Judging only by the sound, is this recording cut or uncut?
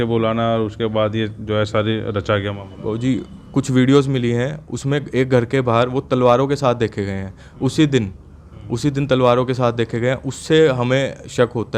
uncut